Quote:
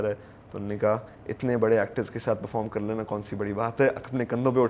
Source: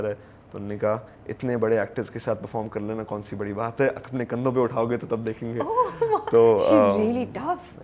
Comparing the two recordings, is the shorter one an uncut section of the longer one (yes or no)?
yes